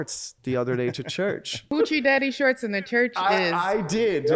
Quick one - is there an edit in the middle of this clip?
yes; 1 cut; at 1.7 s

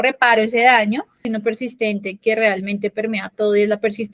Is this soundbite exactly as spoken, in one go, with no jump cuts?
no; 1 cut; at 1.3 s

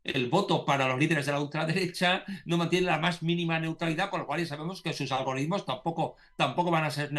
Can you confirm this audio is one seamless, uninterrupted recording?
yes; 0 cuts

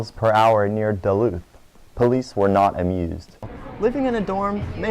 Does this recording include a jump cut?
yes; 1 cut; at 3.5 s

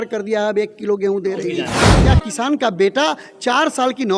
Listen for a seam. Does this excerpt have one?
yes; 1 cut; at 1.8 s

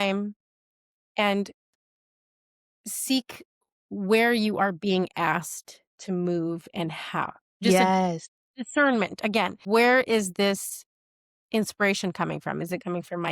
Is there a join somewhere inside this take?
yes; 2 cuts; at 7.6 s, 9.6 s

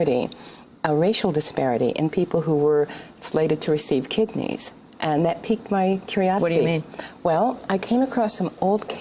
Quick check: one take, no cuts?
no; 1 cut; at 2.3 s

